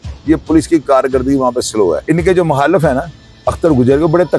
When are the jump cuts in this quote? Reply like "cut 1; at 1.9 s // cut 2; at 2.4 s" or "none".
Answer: cut 1; at 2.0 s